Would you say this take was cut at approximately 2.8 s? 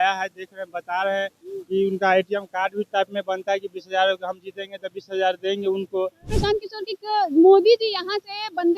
no; 1 cut; at 6.3 s

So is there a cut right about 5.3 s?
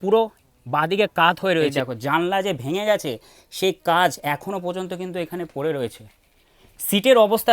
no; 1 cut; at 1.7 s

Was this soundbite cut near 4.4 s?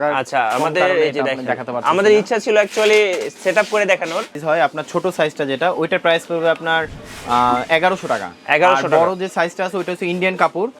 yes; 1 cut; at 4.4 s

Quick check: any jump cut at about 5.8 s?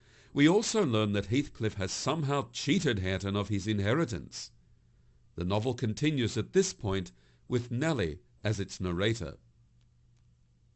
yes; 1 cut; at 5.8 s

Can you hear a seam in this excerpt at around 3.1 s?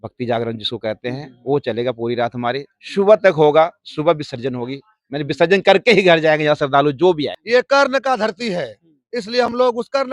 no; 1 cut; at 7.3 s

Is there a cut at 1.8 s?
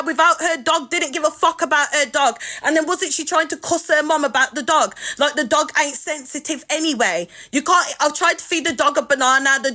no; 0 cuts

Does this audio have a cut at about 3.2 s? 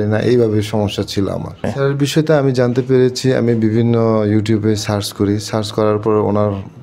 no; 1 cut; at 1.7 s

